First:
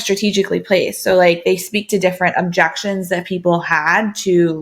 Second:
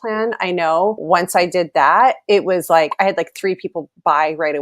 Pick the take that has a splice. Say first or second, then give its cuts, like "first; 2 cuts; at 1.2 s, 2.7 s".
second; 1 cut; at 1.0 s